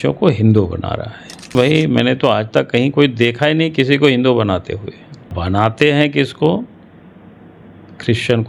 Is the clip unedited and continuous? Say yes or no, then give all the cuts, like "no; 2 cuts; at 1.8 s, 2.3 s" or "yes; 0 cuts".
no; 2 cuts; at 1.5 s, 5.3 s